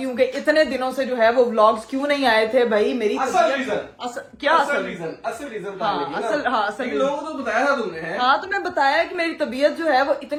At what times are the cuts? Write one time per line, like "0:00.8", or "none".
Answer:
none

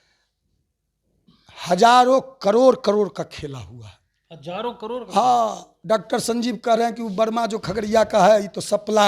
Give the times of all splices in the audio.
0:05.7

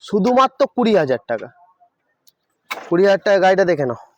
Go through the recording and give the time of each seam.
none

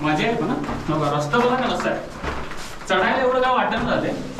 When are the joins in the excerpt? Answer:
none

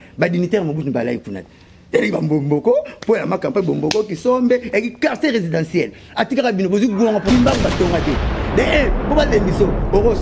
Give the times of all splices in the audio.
0:07.3

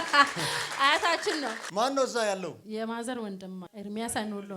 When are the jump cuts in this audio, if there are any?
0:01.6
0:03.7

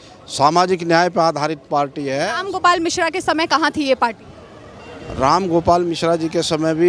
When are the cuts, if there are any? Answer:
none

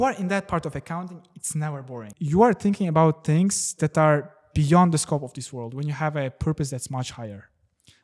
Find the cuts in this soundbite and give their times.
0:02.1

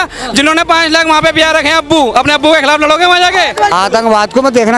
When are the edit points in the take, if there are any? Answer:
0:03.7

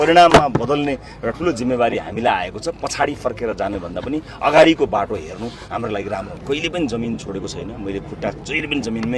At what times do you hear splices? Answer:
0:06.4

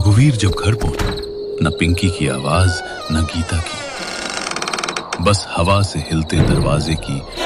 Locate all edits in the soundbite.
0:00.9

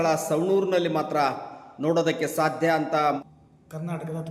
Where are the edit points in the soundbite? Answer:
0:03.2

